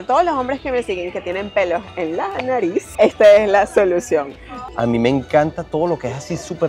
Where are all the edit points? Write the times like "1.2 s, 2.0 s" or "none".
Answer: 2.9 s, 4.6 s